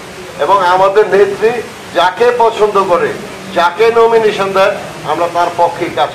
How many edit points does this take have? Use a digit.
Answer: 0